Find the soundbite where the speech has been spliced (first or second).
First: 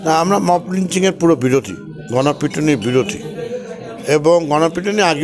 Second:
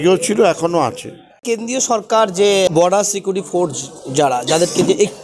second